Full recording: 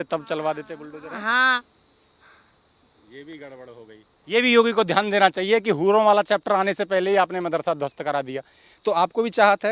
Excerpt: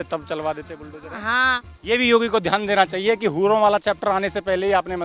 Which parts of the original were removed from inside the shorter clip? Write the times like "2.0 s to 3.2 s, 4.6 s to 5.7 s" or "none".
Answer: 1.7 s to 4.2 s